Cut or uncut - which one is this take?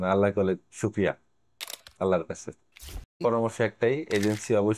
cut